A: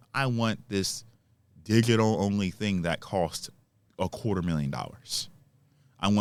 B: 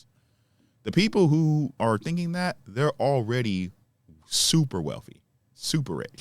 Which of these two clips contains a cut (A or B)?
B